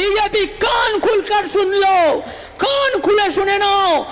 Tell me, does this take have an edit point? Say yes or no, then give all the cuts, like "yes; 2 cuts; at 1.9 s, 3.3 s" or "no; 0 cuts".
no; 0 cuts